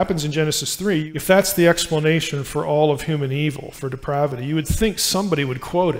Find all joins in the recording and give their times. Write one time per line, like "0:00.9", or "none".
0:01.0